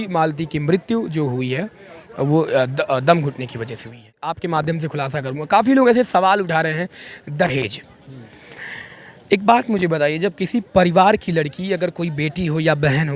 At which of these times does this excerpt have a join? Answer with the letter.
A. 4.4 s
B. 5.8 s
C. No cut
A